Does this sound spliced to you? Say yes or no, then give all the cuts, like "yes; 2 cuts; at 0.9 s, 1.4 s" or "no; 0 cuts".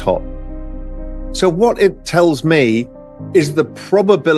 no; 0 cuts